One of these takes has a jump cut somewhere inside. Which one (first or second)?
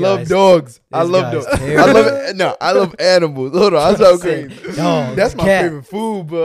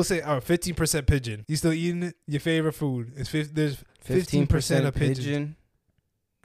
second